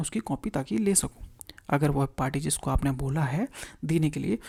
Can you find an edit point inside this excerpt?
no; 0 cuts

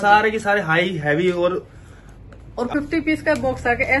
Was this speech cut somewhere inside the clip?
yes; 1 cut; at 2.7 s

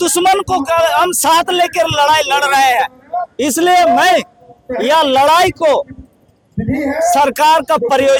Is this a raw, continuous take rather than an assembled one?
yes; 0 cuts

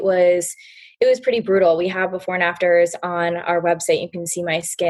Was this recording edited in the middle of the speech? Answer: no; 0 cuts

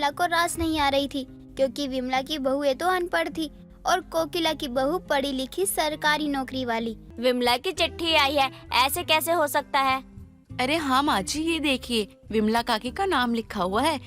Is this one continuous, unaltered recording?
no; 1 cut; at 7.1 s

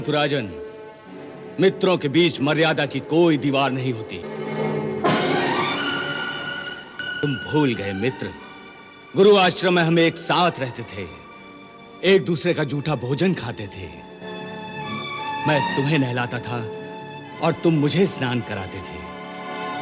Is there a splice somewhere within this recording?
no; 0 cuts

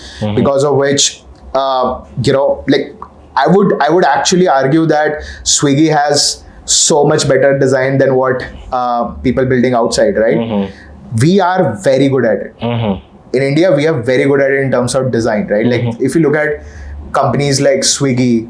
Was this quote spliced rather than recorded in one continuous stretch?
no; 0 cuts

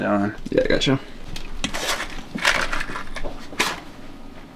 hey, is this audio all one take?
no; 1 cut; at 1.4 s

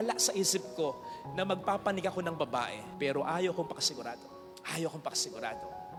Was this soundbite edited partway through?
no; 0 cuts

